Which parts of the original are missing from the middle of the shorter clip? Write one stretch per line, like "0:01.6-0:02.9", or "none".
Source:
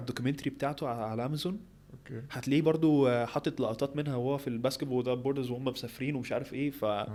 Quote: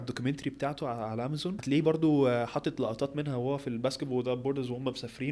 0:01.6-0:02.4